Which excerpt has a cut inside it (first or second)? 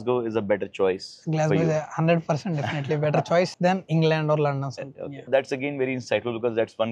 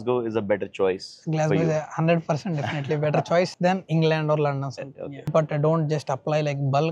second